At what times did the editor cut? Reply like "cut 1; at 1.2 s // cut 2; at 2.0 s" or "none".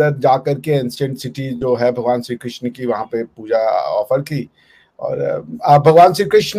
none